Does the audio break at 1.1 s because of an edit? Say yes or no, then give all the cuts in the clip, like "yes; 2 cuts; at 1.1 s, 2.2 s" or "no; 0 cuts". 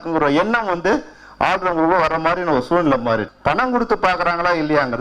no; 1 cut; at 3.3 s